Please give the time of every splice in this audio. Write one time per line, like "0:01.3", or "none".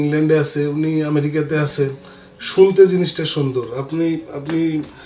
none